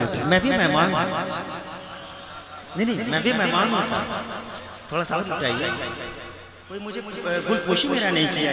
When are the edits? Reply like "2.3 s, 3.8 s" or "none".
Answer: 6.9 s